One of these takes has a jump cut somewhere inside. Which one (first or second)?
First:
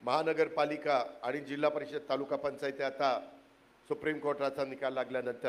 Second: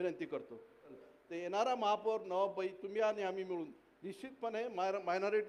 second